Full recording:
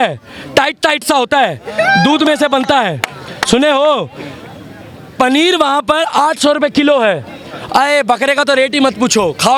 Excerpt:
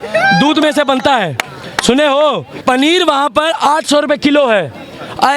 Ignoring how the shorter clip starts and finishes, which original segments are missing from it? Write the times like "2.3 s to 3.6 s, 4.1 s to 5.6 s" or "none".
4.1 s to 5.0 s